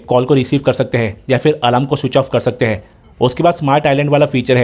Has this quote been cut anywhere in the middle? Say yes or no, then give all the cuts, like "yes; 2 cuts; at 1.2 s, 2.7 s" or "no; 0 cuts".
yes; 1 cut; at 2.9 s